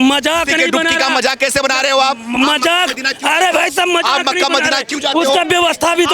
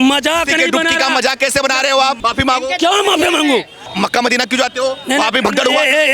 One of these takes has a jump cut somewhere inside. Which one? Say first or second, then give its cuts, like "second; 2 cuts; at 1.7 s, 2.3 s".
second; 2 cuts; at 2.2 s, 3.9 s